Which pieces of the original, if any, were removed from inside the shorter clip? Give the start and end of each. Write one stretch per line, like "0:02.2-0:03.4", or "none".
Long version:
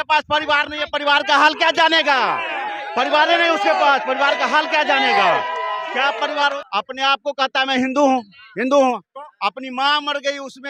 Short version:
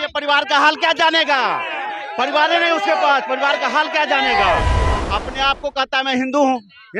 0:05.8-0:06.7